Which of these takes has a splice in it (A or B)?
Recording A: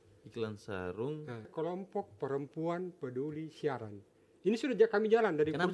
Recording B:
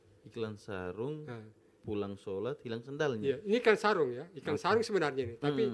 A